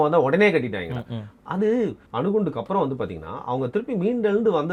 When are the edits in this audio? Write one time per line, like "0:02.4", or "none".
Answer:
0:02.0